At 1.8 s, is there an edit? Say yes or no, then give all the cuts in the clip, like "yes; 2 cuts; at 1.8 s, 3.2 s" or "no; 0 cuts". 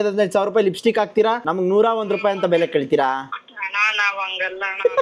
no; 1 cut; at 3.4 s